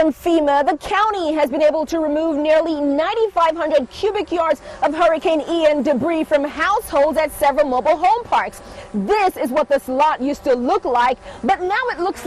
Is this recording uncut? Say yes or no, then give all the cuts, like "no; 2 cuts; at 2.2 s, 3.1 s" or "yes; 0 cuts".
yes; 0 cuts